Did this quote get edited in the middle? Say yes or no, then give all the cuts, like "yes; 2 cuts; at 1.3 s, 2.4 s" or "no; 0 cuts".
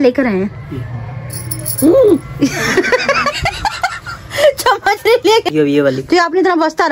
yes; 2 cuts; at 2.3 s, 5.5 s